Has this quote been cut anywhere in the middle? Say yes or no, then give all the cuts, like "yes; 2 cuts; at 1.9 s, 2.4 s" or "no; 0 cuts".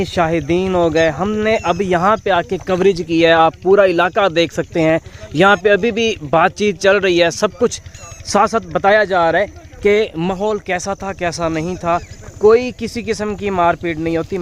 no; 0 cuts